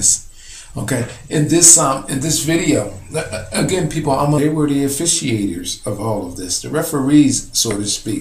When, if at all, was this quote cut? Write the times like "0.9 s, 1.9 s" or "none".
none